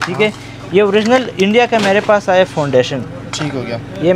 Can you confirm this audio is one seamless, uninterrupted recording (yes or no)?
yes